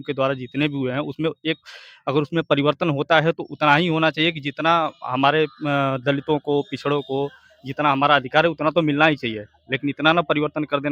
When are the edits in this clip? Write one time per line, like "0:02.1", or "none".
none